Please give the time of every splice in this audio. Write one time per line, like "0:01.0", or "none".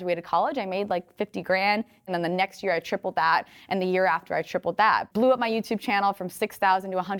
0:02.1
0:05.0